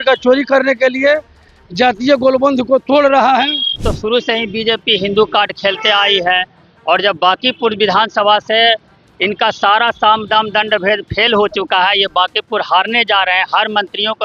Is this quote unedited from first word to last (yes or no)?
no